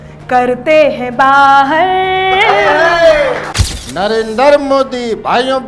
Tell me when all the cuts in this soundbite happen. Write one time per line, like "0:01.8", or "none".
0:03.5